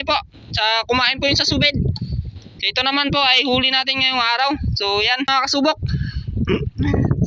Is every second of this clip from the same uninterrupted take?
no; 1 cut; at 5.3 s

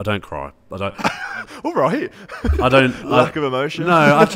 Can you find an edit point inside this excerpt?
no; 0 cuts

